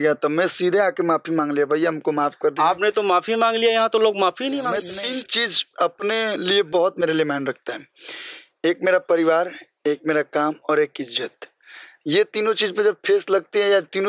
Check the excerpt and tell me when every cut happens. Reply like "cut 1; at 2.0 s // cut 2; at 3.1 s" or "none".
cut 1; at 4.8 s